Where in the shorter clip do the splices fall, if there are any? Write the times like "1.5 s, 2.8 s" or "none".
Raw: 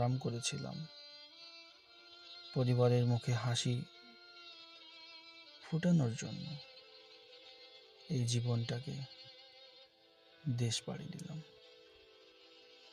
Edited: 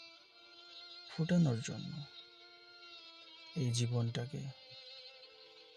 1.0 s